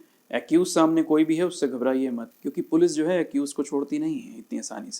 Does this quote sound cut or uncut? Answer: cut